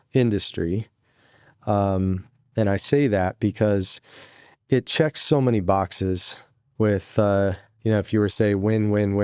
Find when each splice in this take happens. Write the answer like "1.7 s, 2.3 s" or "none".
none